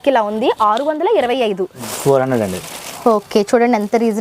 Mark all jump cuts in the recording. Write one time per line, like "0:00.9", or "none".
0:01.9